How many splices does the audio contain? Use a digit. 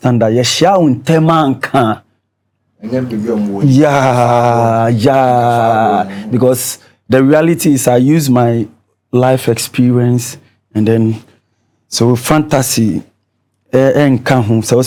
0